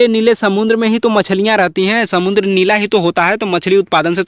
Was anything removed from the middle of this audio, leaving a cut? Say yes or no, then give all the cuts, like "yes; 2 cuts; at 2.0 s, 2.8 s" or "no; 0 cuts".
no; 0 cuts